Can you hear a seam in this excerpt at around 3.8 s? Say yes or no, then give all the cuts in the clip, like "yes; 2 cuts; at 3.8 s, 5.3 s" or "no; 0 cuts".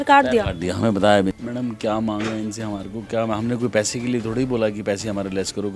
no; 1 cut; at 1.4 s